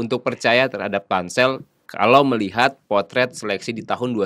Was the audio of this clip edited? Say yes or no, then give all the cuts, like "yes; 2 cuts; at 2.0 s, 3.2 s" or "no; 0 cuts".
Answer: no; 0 cuts